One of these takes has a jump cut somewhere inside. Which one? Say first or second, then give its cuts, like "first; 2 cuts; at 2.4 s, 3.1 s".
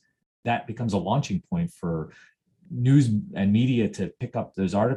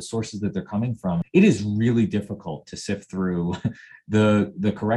second; 1 cut; at 1.2 s